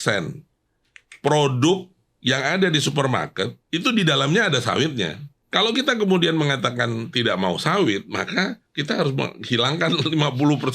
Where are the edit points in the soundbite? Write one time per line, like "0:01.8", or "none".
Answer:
0:05.4